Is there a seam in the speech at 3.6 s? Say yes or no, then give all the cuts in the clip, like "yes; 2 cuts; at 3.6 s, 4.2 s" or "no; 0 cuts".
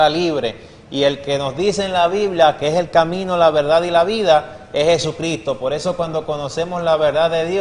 yes; 1 cut; at 3.6 s